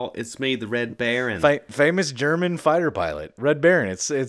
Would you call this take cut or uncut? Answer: cut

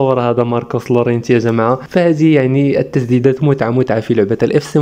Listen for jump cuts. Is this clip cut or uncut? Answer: uncut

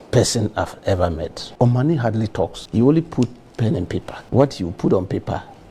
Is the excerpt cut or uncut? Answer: cut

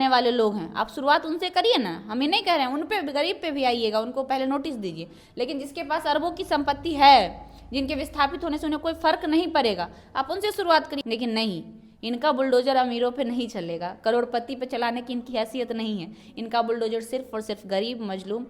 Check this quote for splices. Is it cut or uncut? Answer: cut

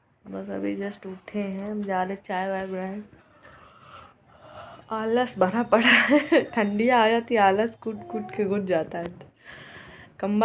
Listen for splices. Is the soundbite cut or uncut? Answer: uncut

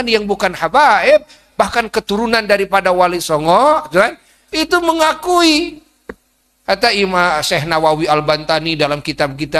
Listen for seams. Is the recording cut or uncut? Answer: uncut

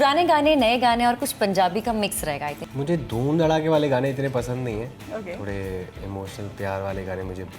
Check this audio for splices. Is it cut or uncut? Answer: uncut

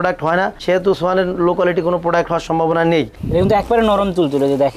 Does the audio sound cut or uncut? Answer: cut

